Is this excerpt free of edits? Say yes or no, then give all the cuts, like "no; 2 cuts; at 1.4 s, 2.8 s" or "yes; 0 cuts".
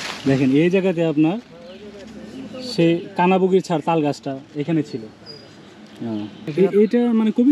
no; 1 cut; at 6.4 s